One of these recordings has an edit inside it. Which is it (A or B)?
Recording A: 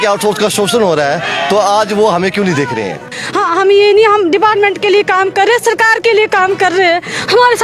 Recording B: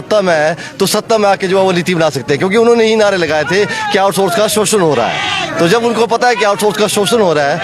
A